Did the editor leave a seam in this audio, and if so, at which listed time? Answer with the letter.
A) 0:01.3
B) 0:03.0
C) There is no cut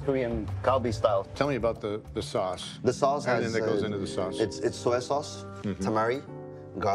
A